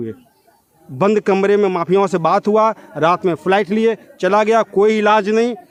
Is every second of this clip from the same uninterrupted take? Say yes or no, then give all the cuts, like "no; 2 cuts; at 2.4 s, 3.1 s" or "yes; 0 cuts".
yes; 0 cuts